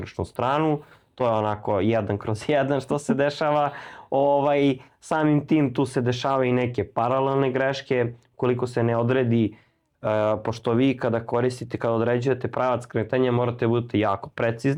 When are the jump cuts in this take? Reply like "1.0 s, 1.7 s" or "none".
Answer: none